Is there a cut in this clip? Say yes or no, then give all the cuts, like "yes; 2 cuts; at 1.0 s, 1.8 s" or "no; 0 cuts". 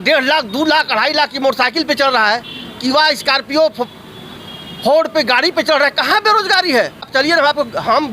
yes; 1 cut; at 7.1 s